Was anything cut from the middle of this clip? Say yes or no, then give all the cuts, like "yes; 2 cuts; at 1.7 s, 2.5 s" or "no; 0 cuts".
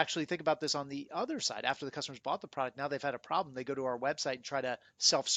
no; 0 cuts